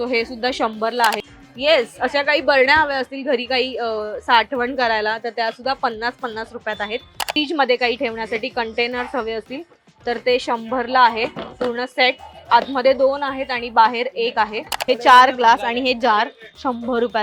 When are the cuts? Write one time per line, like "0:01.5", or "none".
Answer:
0:01.2
0:07.3
0:14.7